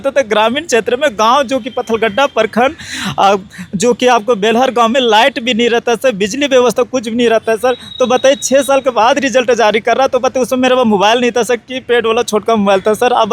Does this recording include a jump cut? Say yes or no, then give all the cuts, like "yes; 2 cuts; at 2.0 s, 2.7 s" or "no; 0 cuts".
no; 0 cuts